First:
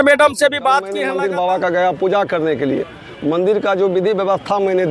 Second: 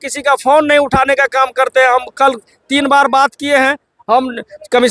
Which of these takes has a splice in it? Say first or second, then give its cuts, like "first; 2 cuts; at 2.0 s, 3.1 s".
first; 1 cut; at 1.0 s